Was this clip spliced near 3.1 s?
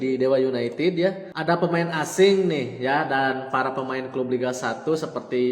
no; 1 cut; at 1.3 s

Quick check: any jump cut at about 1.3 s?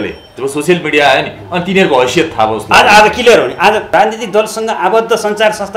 no; 1 cut; at 3.9 s

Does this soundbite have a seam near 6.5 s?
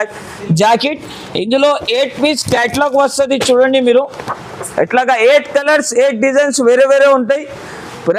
no; 0 cuts

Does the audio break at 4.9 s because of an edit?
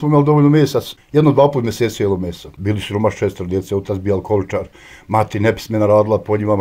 no; 2 cuts; at 0.9 s, 2.5 s

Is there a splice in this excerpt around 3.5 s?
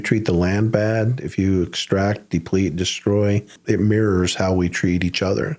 yes; 1 cut; at 3.5 s

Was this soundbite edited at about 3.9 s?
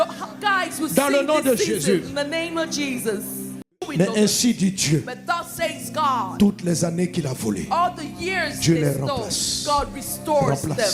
yes; 1 cut; at 3.9 s

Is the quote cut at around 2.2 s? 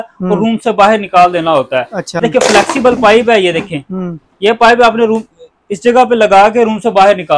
yes; 1 cut; at 2.2 s

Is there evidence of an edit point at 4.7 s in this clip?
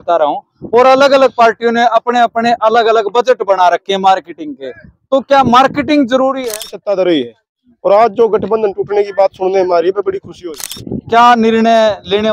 no; 2 cuts; at 6.6 s, 10.7 s

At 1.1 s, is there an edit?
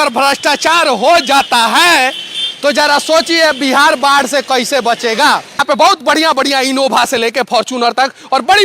no; 1 cut; at 5.6 s

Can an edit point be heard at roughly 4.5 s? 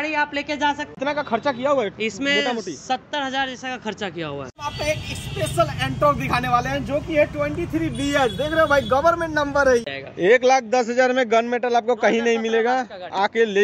yes; 3 cuts; at 0.9 s, 4.5 s, 9.8 s

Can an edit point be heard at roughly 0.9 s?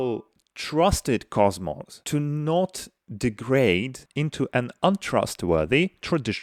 no; 0 cuts

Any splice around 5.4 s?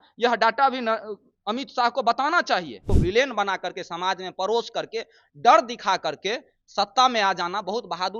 no; 1 cut; at 2.8 s

